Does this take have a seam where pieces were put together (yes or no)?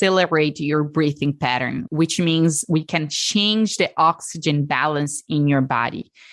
yes